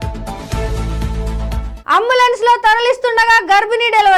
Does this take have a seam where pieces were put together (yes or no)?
yes